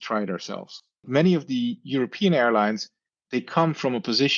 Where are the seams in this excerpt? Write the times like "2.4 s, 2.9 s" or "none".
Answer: 1.1 s